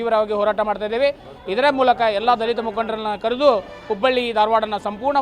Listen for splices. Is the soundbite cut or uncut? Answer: uncut